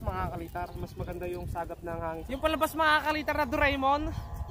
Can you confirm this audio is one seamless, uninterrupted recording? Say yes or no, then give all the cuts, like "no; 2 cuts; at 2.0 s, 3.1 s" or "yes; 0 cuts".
no; 1 cut; at 2.2 s